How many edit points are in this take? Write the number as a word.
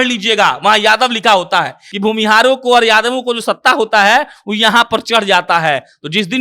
one